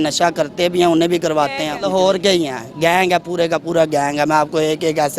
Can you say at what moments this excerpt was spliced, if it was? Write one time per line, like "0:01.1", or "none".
0:01.7